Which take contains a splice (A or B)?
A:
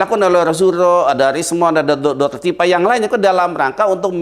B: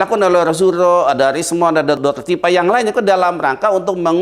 B